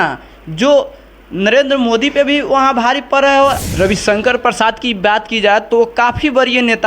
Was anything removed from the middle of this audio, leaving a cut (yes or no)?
yes